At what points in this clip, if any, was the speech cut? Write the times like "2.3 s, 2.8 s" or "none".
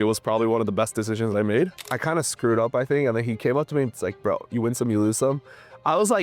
1.8 s